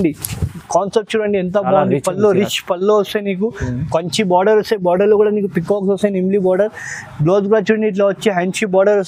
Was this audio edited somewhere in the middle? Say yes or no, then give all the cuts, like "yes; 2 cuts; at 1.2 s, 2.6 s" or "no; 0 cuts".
no; 0 cuts